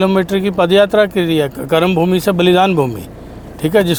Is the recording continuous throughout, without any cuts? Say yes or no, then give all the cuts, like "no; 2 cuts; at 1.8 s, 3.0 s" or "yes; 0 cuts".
yes; 0 cuts